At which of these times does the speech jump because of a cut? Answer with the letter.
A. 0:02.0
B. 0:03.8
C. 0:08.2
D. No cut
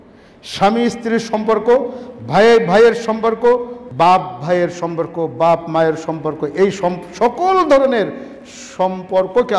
B